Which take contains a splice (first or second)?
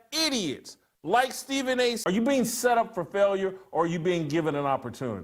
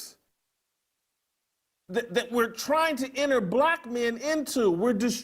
first